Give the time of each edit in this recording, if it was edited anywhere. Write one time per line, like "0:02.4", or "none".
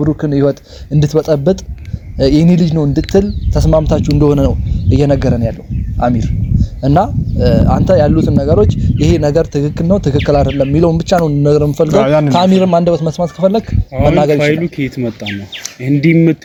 none